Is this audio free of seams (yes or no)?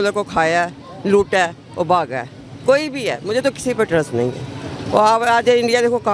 yes